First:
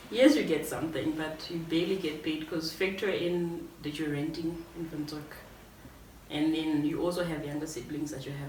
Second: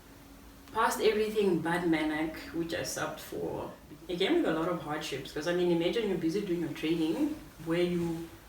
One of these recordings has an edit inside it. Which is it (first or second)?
second